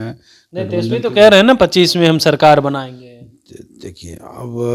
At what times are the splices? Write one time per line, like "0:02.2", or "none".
none